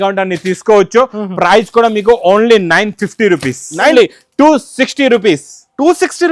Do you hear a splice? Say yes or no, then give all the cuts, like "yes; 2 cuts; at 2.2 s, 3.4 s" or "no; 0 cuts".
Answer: yes; 1 cut; at 3.9 s